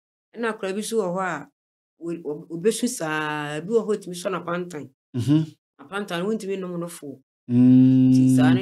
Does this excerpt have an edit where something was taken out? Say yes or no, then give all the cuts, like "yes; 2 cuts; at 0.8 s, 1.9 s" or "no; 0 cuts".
no; 0 cuts